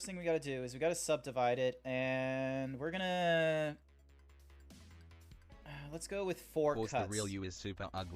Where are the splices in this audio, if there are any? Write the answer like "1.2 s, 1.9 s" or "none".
2.0 s, 5.4 s